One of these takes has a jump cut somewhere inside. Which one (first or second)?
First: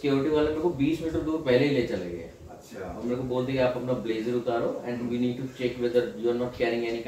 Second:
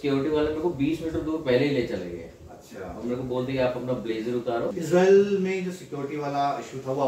second